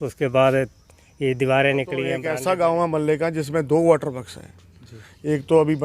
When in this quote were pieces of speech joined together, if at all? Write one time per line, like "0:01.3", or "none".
0:02.2